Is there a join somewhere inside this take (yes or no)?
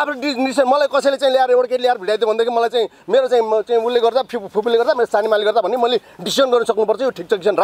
no